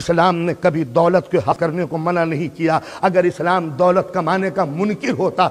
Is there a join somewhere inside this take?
yes; 1 cut; at 1.5 s

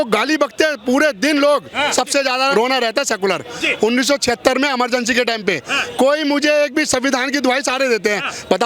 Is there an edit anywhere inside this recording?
yes; 1 cut; at 2.2 s

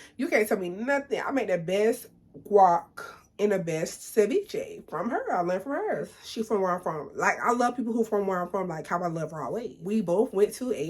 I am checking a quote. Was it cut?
yes; 2 cuts; at 6.0 s, 9.7 s

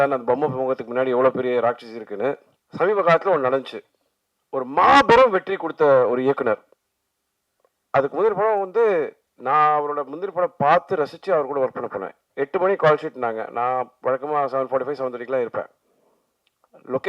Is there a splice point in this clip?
yes; 1 cut; at 2.5 s

